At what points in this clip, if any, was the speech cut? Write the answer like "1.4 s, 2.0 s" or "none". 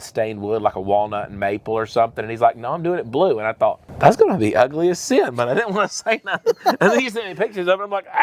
none